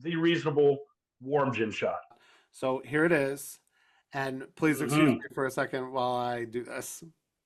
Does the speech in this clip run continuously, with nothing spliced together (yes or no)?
no